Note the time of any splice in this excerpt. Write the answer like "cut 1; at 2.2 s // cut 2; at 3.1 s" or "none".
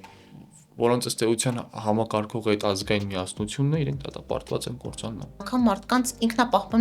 cut 1; at 5.4 s